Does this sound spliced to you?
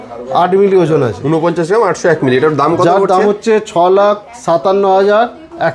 no; 0 cuts

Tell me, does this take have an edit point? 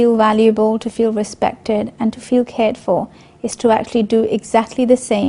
yes; 1 cut; at 2.6 s

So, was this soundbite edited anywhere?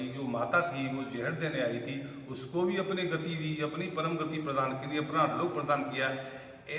no; 0 cuts

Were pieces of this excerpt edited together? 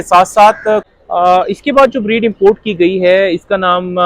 yes; 1 cut; at 0.9 s

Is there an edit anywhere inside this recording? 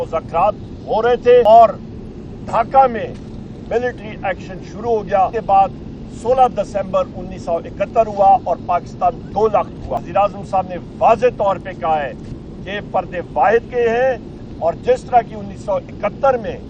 yes; 3 cuts; at 1.4 s, 5.3 s, 10.0 s

